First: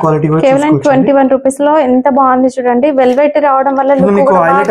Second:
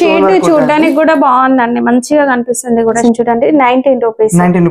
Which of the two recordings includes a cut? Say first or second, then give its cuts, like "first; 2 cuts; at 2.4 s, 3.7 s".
second; 1 cut; at 3.0 s